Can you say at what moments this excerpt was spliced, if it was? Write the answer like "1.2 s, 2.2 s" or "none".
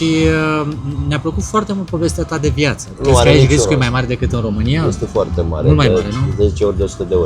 2.9 s